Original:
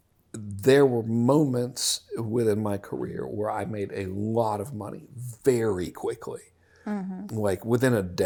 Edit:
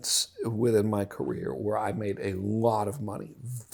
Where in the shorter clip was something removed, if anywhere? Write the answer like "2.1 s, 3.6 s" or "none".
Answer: none